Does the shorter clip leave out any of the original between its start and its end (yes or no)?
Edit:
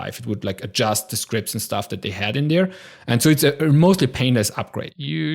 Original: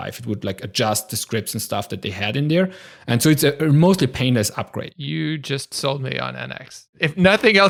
no